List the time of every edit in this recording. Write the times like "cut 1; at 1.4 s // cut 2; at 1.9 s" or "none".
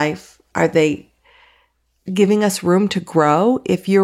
none